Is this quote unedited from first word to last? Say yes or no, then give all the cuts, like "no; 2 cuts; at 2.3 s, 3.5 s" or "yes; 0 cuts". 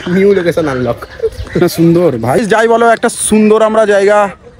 no; 1 cut; at 2.4 s